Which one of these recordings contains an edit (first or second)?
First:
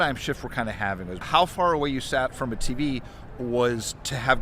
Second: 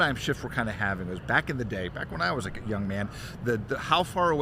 first